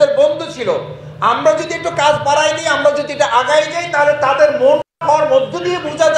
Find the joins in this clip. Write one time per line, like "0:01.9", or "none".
0:04.9